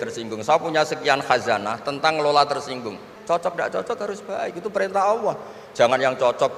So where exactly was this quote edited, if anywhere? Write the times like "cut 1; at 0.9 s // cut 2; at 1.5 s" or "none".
cut 1; at 3.1 s